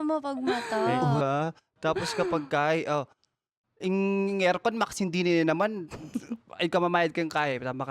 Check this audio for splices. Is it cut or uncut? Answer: cut